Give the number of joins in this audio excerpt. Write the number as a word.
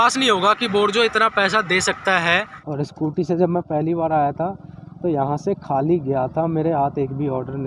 one